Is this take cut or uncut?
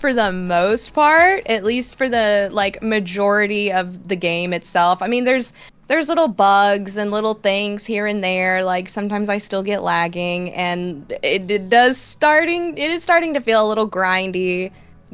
uncut